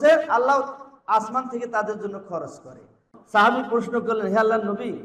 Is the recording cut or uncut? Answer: cut